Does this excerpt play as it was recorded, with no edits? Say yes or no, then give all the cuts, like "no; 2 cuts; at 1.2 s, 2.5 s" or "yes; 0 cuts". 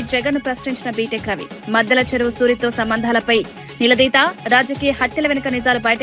yes; 0 cuts